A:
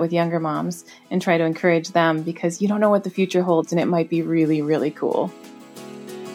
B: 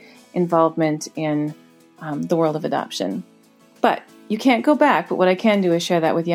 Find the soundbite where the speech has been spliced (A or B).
A